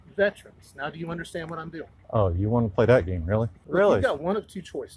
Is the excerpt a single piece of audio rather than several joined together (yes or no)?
no